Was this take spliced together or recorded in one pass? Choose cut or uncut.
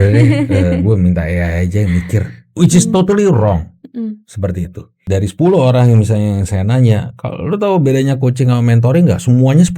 cut